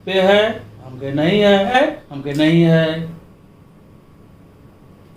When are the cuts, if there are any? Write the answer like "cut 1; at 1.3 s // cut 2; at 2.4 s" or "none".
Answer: cut 1; at 1.7 s